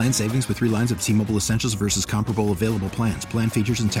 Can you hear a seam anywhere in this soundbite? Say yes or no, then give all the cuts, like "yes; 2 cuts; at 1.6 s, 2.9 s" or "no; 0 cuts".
no; 0 cuts